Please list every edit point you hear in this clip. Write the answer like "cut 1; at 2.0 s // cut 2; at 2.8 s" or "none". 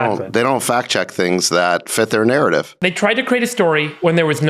cut 1; at 2.7 s